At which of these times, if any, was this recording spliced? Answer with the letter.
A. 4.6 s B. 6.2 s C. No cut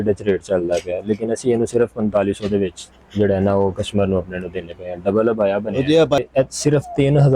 B